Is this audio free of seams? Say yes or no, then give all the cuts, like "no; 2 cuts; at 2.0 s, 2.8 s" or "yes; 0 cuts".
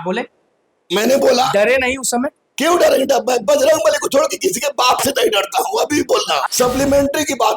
no; 1 cut; at 6.4 s